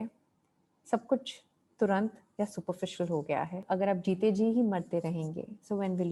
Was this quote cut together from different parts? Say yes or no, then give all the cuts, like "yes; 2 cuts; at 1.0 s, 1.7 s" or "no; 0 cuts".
yes; 1 cut; at 3.6 s